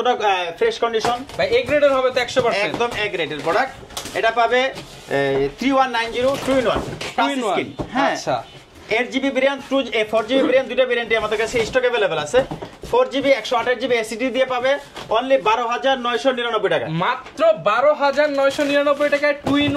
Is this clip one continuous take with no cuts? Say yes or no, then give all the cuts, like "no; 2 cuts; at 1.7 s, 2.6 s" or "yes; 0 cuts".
yes; 0 cuts